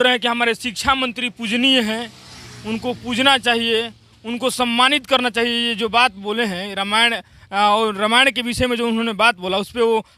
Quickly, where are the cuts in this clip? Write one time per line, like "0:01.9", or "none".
none